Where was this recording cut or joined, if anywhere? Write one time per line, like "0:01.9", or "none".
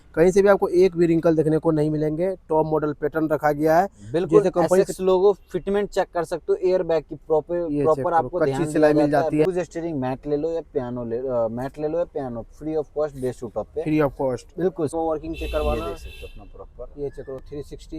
0:09.5
0:14.9